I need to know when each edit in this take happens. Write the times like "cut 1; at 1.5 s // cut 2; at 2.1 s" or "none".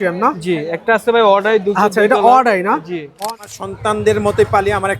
cut 1; at 3.2 s